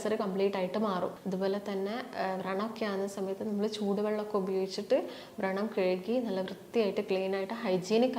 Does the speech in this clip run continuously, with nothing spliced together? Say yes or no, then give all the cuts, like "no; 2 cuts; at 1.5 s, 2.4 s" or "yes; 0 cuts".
no; 1 cut; at 1.2 s